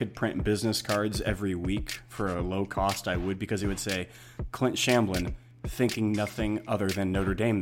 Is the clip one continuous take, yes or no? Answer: yes